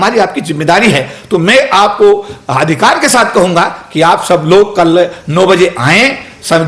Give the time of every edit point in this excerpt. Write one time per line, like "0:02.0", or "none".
none